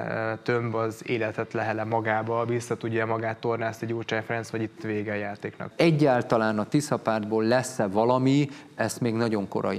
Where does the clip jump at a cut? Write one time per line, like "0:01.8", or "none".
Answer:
0:05.6